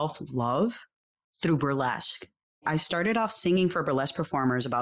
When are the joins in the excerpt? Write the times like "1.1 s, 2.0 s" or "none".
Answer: 2.6 s